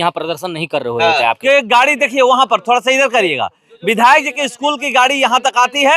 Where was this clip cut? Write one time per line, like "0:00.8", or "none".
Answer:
0:01.4